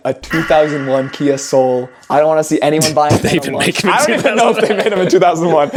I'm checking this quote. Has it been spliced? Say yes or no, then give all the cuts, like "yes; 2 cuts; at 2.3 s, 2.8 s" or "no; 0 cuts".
no; 0 cuts